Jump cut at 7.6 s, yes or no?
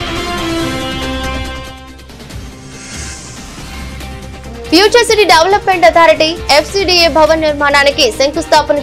no